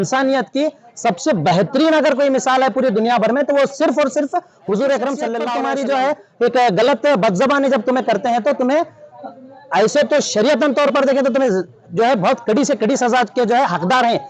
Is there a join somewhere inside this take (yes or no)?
yes